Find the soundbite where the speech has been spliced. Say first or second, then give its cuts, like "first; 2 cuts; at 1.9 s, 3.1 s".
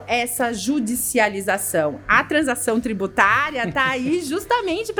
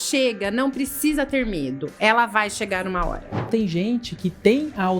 second; 1 cut; at 3.5 s